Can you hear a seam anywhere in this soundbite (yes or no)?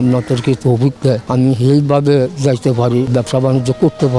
yes